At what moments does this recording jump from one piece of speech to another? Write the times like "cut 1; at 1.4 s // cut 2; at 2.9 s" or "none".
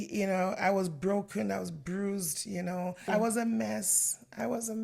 cut 1; at 3.0 s